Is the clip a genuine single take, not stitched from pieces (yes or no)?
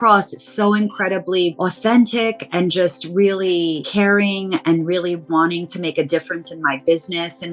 no